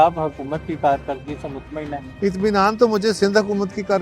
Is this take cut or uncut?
cut